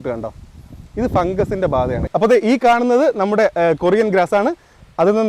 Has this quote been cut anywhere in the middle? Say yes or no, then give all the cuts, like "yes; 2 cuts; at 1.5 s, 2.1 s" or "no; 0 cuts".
yes; 1 cut; at 2.0 s